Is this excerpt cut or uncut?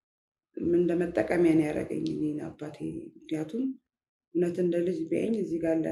uncut